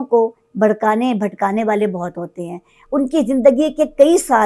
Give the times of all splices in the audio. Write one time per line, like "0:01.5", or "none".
none